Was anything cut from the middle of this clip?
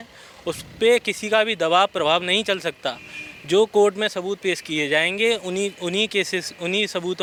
no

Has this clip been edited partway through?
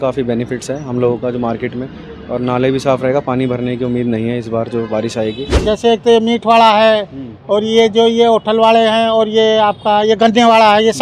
yes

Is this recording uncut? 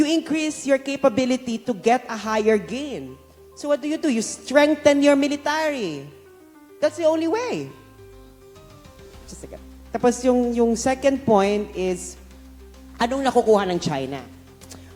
yes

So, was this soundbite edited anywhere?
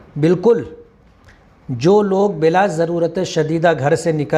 no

